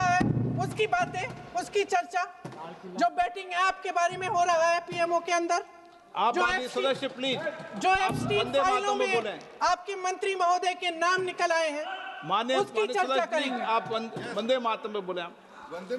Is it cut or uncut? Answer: uncut